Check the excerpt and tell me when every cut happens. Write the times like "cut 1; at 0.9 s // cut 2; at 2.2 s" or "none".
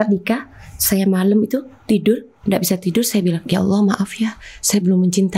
none